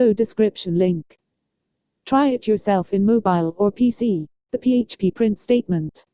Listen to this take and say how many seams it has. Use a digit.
0